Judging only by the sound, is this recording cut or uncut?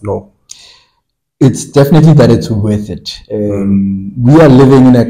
uncut